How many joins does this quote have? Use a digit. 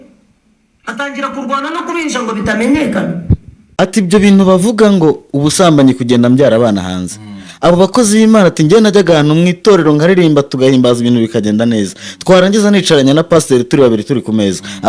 1